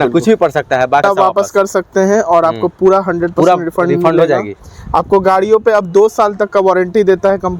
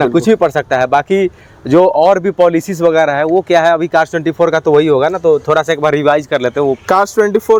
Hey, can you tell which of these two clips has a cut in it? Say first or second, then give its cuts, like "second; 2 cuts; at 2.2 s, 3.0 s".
first; 1 cut; at 1.0 s